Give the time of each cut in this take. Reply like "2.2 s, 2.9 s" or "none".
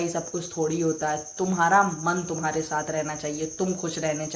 none

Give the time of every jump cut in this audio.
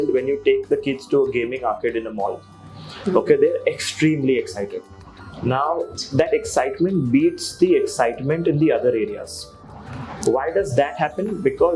none

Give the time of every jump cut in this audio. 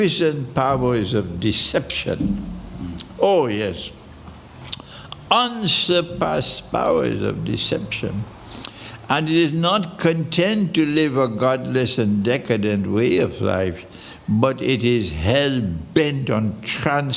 none

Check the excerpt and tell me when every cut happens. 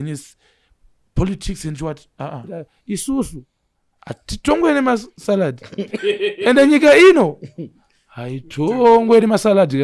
2.7 s

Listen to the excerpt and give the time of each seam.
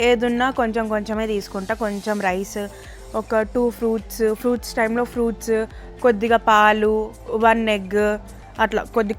none

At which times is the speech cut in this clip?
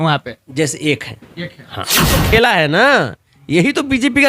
2.1 s

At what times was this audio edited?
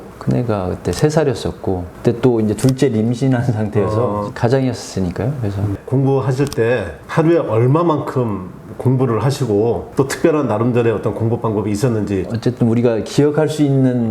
4.3 s, 5.7 s

